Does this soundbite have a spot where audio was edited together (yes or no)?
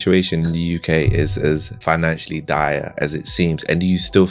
yes